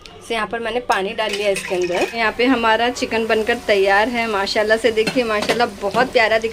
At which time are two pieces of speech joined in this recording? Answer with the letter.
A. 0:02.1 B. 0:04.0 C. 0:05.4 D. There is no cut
A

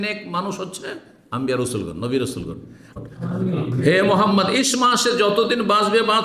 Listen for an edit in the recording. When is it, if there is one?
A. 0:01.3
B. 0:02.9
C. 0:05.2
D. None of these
B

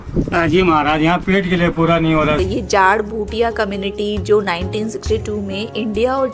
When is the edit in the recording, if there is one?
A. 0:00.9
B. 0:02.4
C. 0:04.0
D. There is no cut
B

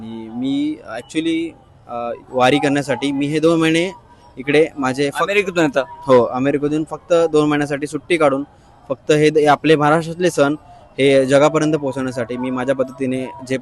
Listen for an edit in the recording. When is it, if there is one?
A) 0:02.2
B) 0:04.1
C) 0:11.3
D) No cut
A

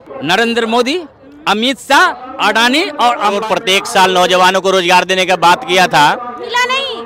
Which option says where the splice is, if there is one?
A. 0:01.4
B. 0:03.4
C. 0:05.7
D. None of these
B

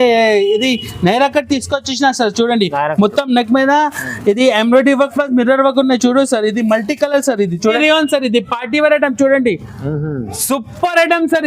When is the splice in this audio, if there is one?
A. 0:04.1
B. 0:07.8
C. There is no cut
B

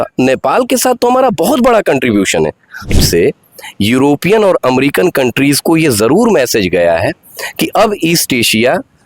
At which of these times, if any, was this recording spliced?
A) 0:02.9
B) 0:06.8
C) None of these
A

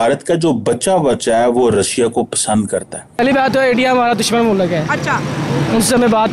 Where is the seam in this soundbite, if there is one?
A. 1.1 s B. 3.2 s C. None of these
B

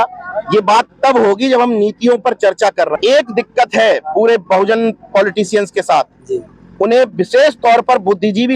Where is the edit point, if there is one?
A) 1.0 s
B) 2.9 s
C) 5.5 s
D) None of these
B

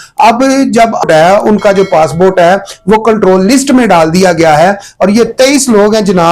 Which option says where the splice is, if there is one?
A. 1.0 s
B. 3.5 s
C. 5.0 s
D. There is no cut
A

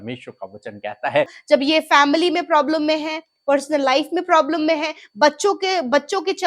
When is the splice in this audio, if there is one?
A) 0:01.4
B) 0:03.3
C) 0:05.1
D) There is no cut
A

